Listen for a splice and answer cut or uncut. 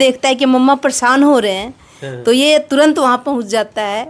uncut